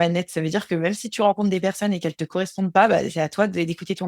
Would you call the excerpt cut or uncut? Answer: uncut